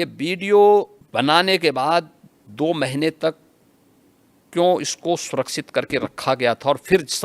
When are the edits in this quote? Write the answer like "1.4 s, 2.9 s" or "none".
1.0 s